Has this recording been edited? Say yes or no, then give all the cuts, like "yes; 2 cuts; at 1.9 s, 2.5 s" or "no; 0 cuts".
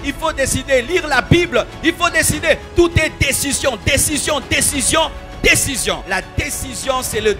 yes; 1 cut; at 6.0 s